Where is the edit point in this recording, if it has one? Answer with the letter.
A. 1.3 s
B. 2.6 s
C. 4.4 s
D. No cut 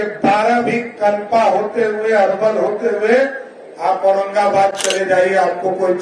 D